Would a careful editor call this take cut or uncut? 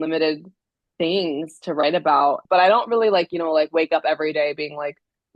cut